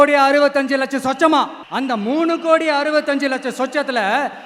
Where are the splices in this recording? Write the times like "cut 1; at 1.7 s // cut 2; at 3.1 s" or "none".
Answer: none